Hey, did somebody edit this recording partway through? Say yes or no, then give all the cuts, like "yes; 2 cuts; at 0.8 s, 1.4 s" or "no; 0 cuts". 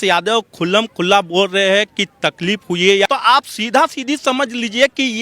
yes; 1 cut; at 3.1 s